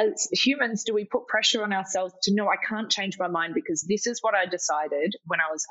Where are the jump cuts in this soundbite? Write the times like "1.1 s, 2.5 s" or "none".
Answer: none